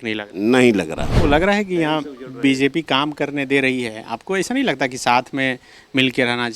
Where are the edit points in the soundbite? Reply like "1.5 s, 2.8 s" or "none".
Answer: 1.0 s